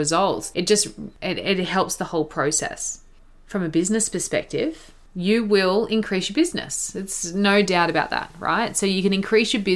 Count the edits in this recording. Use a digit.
1